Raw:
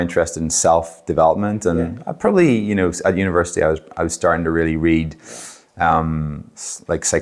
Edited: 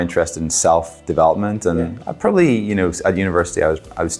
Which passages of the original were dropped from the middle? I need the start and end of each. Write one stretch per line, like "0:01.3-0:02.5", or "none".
none